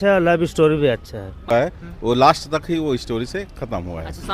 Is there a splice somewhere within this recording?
yes; 1 cut; at 1.5 s

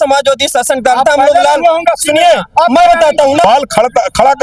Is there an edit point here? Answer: yes; 1 cut; at 3.4 s

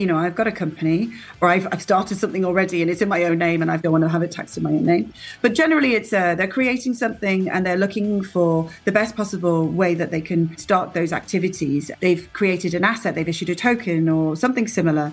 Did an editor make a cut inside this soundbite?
yes; 4 cuts; at 1.4 s, 3.8 s, 10.6 s, 11.9 s

